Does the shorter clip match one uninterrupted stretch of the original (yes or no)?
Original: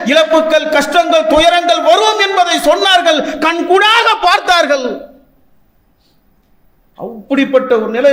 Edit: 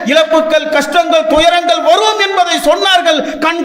yes